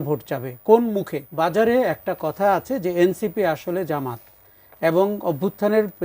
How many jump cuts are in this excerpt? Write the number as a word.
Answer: one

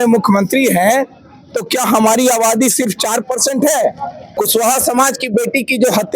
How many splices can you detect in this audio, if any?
one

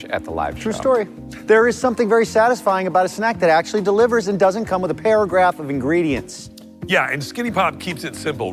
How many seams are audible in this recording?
zero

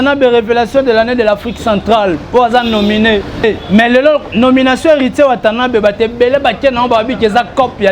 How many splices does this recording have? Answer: one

